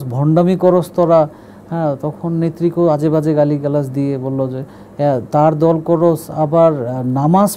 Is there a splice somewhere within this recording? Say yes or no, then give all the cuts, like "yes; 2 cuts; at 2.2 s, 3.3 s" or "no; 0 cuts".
no; 0 cuts